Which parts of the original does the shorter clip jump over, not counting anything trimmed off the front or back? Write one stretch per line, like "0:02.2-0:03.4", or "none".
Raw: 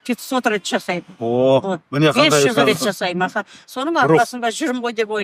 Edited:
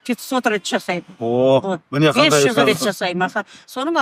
none